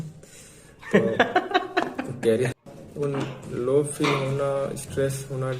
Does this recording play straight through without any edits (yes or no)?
no